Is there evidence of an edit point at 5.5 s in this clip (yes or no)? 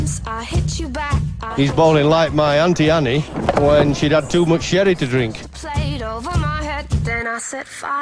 no